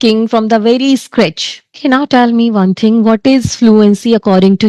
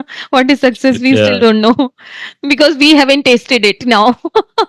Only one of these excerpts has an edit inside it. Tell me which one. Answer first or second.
first